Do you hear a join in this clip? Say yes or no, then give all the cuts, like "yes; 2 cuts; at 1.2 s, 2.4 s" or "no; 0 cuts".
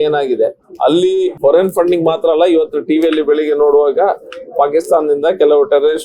yes; 1 cut; at 1.4 s